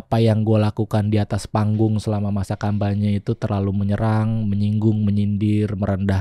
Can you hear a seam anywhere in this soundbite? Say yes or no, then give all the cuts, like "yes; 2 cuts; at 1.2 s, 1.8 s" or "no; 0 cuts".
no; 0 cuts